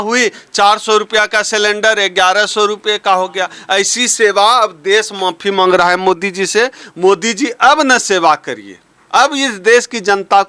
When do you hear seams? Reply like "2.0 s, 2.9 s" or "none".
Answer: none